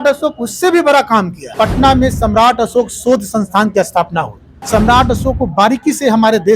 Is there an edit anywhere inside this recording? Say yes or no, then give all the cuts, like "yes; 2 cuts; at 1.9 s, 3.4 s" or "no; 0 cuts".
yes; 2 cuts; at 1.4 s, 4.6 s